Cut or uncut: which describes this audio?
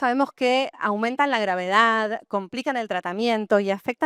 uncut